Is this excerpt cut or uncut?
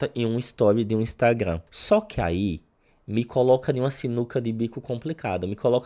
cut